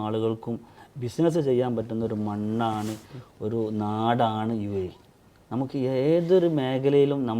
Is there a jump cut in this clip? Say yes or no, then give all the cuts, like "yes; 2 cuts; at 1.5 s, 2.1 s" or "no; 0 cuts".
no; 0 cuts